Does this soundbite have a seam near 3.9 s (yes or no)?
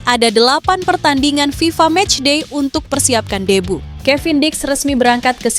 yes